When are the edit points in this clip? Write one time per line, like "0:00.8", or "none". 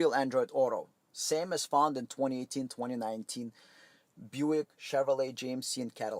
none